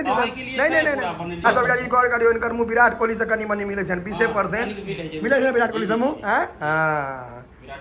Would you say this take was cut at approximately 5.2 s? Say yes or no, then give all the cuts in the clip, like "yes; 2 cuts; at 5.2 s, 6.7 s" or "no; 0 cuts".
no; 1 cut; at 1.4 s